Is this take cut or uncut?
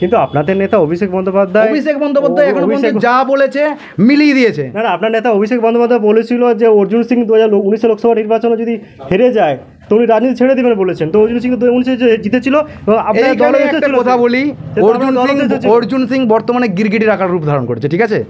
uncut